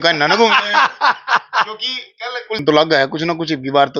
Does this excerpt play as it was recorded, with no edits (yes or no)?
no